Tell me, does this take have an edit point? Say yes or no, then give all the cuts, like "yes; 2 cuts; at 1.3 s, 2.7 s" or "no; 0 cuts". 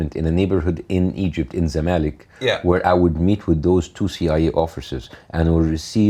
no; 0 cuts